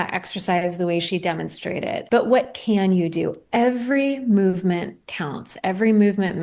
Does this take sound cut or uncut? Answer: cut